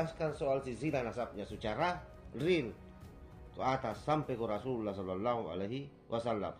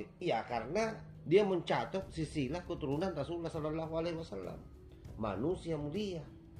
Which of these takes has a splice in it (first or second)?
second